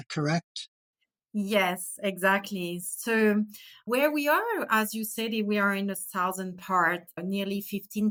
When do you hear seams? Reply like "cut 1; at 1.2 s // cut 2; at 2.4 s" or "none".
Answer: none